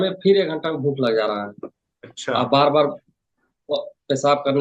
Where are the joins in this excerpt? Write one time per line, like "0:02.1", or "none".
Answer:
none

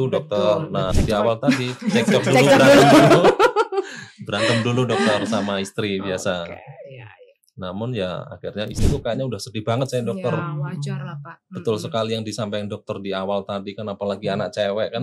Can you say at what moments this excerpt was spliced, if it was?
0:01.0
0:08.8

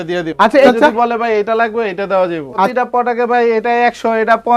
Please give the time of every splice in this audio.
0:00.7
0:02.7

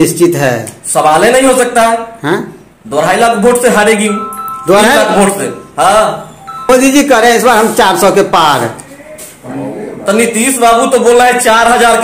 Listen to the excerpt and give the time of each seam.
none

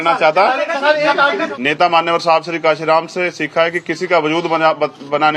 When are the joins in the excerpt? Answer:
0:01.5

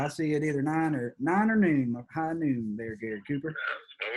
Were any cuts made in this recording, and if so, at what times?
none

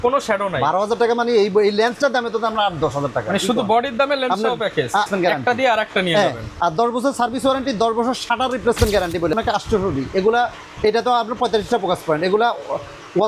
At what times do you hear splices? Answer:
0:05.1
0:09.3

